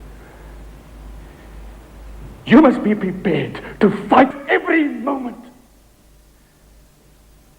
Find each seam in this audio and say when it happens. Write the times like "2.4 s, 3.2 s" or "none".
4.3 s